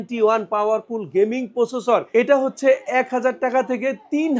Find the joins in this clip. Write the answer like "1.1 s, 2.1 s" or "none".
2.1 s